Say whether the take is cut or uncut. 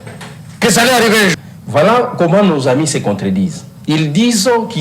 cut